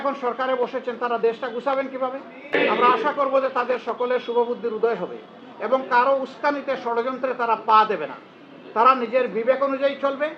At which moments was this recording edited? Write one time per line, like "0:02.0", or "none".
0:02.5